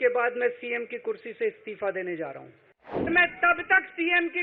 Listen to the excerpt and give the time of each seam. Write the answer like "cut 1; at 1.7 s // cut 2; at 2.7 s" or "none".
cut 1; at 3.1 s